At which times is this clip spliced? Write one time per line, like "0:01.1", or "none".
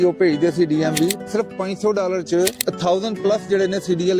0:01.3
0:02.7